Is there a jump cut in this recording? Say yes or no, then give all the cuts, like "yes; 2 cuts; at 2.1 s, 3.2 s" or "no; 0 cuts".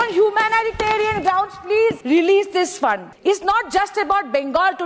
yes; 2 cuts; at 2.0 s, 3.1 s